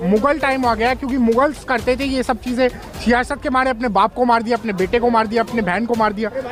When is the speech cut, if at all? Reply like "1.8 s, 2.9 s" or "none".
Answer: none